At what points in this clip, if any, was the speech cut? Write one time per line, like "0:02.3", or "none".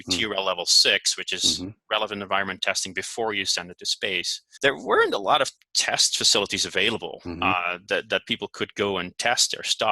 0:04.4
0:05.7